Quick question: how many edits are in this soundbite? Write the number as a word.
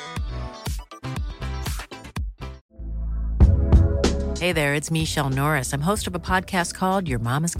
one